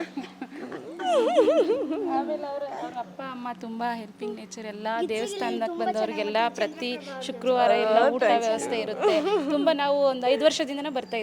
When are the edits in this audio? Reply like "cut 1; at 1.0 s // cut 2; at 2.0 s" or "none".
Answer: none